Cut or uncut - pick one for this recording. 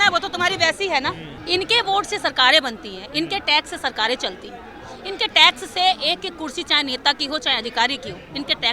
cut